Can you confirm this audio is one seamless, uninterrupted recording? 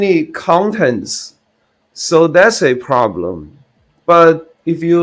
yes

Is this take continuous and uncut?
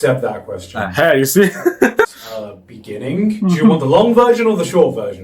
no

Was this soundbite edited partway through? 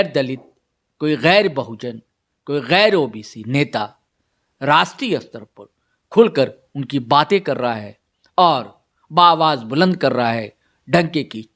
no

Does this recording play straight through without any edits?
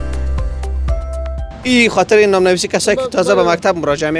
no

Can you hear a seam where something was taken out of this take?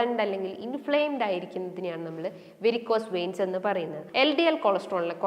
yes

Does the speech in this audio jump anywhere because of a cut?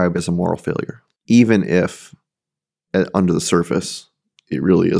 yes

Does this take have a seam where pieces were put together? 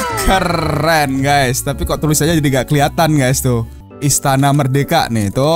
yes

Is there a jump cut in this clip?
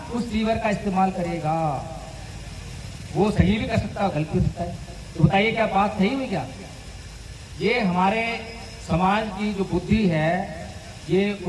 no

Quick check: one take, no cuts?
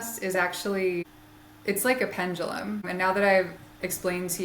no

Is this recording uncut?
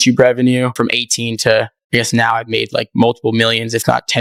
yes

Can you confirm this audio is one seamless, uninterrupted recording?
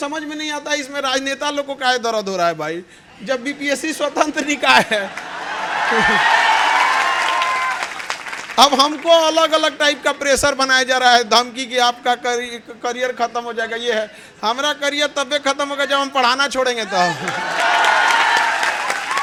yes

